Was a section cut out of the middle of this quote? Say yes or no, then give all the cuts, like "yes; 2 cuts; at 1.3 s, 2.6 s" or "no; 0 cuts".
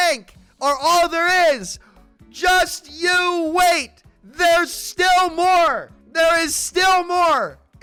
no; 0 cuts